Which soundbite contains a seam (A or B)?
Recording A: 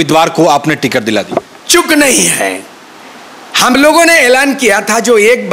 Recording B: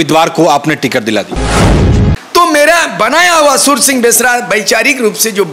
B